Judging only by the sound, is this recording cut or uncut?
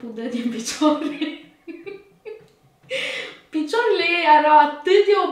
uncut